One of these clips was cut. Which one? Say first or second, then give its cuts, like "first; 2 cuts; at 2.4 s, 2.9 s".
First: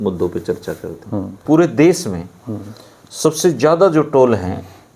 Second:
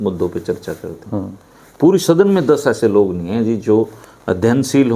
first; 1 cut; at 1.4 s